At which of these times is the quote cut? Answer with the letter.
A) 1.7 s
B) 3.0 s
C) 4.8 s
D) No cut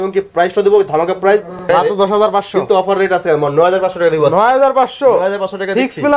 A